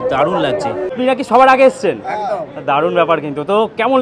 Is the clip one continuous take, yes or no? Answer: no